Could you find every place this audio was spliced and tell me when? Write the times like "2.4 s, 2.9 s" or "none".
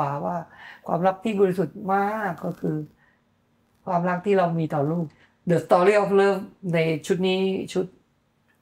5.0 s